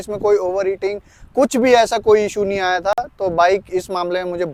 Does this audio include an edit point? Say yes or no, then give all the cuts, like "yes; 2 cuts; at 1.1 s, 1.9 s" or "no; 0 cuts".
no; 0 cuts